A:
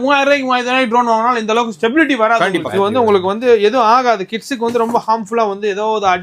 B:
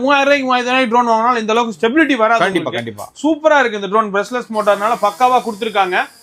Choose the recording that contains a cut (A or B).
A